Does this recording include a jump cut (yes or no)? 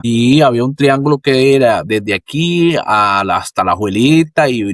no